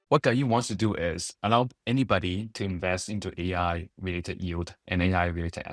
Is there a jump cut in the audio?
no; 0 cuts

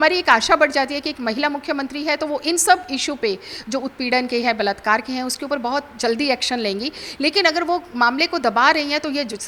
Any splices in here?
no; 0 cuts

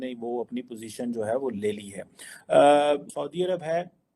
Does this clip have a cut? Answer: yes; 1 cut; at 3.1 s

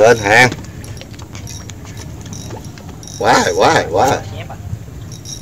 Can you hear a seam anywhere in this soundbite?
no; 0 cuts

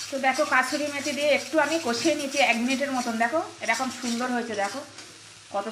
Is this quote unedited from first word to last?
yes; 0 cuts

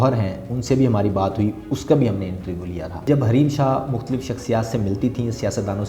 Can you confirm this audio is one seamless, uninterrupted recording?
no; 1 cut; at 3.1 s

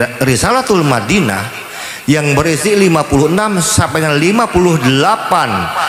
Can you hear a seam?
no; 0 cuts

